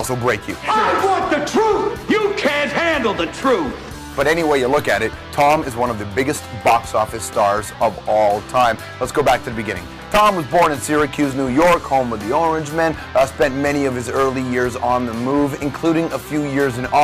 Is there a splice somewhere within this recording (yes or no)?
no